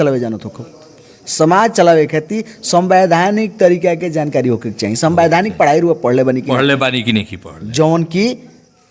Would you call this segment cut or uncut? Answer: uncut